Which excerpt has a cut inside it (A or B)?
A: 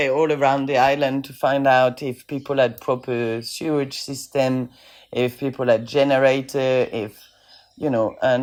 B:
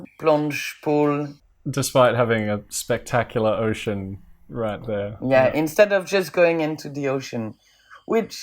B